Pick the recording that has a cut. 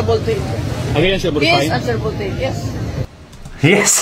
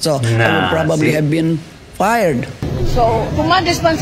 second; 1 cut; at 2.6 s

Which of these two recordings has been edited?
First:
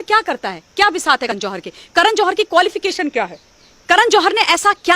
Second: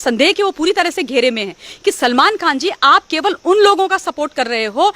first; 1 cut; at 1.3 s

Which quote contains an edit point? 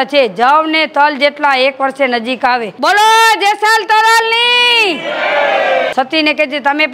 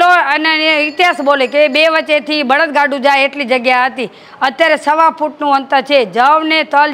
first; 2 cuts; at 2.7 s, 5.9 s

